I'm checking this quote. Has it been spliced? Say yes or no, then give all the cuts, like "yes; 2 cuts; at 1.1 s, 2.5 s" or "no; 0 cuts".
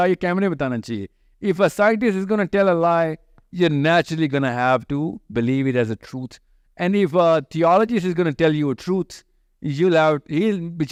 no; 0 cuts